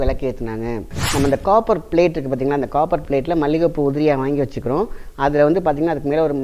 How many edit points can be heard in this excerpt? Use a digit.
1